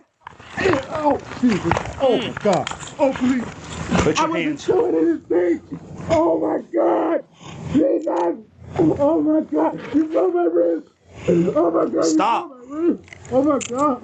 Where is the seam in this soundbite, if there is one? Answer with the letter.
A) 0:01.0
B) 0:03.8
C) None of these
C